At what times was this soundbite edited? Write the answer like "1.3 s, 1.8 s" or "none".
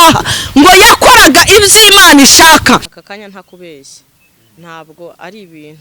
2.9 s

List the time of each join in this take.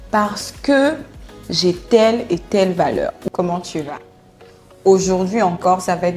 3.2 s

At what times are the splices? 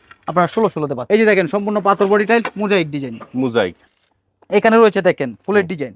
1.0 s, 3.8 s

